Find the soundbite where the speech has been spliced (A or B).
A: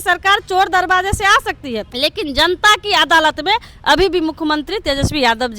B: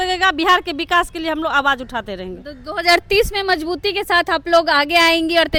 A